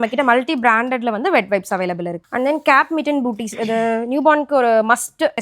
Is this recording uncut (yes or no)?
no